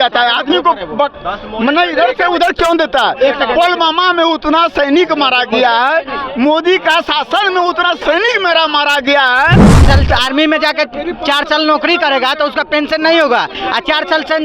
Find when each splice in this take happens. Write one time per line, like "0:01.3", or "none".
0:09.8